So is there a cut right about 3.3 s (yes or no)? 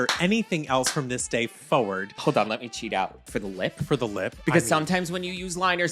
yes